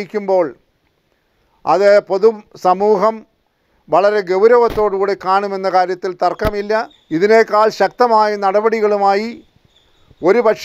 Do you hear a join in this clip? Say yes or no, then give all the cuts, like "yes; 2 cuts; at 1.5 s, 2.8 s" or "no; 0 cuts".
yes; 1 cut; at 7.0 s